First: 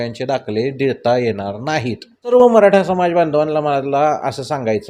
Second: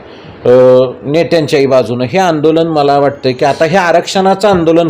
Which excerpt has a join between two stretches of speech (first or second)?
first